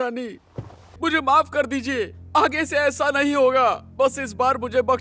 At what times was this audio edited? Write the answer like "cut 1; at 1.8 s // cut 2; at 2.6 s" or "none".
cut 1; at 1.0 s